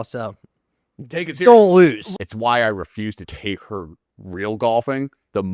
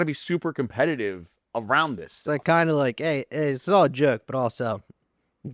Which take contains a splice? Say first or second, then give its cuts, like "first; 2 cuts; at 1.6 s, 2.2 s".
first; 2 cuts; at 2.0 s, 3.3 s